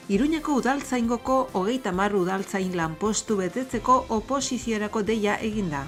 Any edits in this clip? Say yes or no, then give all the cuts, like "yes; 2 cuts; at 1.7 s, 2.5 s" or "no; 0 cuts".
no; 0 cuts